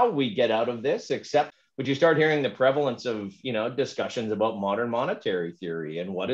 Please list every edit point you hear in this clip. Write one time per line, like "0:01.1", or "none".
0:01.6